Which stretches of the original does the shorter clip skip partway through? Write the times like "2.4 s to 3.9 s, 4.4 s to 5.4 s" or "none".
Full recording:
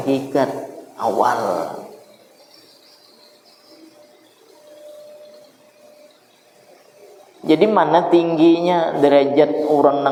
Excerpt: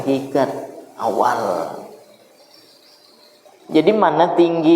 3.4 s to 7.2 s